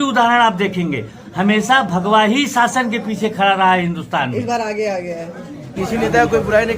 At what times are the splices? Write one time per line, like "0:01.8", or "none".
0:05.7